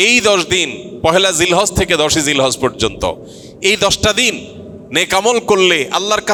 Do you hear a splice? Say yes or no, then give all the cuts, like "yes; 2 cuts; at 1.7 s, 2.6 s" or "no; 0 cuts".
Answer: no; 0 cuts